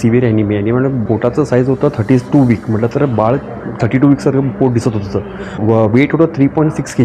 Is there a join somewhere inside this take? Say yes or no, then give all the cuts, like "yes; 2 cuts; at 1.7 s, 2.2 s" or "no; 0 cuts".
yes; 2 cuts; at 1.0 s, 5.6 s